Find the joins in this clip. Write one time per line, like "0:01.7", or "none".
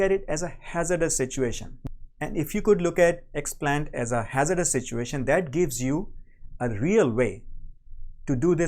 0:01.7